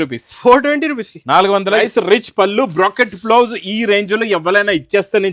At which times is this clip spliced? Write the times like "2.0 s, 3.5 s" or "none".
1.8 s

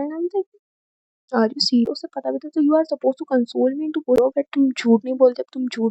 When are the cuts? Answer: 1.9 s, 4.2 s

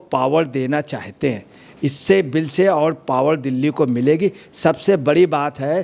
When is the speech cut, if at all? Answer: none

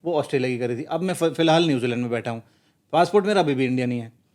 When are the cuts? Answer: none

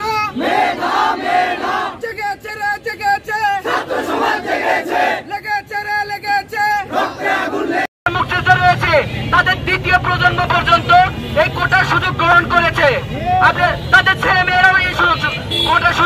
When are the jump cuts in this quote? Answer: 7.9 s

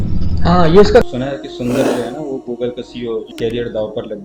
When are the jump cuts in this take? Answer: 1.0 s, 3.3 s

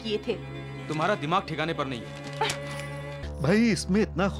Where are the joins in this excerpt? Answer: 3.2 s

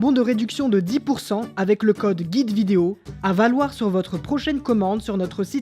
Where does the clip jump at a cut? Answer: 3.1 s

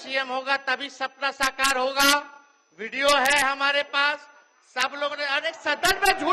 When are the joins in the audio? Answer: none

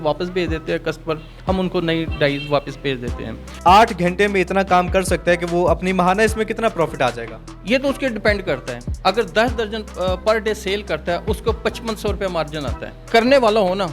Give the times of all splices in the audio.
3.5 s, 13.0 s

